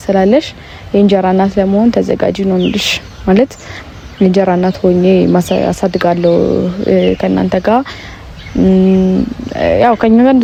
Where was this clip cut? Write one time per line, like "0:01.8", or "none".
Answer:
none